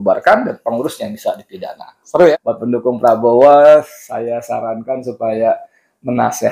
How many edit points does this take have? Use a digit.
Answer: 1